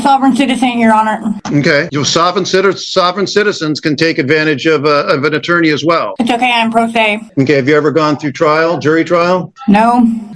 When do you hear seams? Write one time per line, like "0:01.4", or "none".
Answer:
0:07.2